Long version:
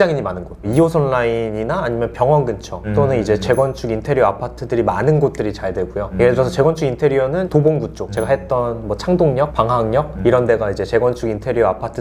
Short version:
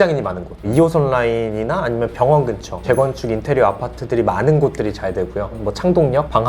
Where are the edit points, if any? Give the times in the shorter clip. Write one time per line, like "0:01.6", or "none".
0:02.8
0:05.5